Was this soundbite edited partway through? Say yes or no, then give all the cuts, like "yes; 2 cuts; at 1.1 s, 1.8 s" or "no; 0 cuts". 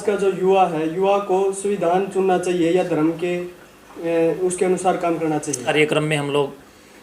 yes; 1 cut; at 5.7 s